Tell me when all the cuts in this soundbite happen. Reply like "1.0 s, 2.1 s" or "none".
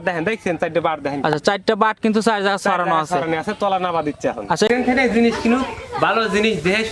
4.7 s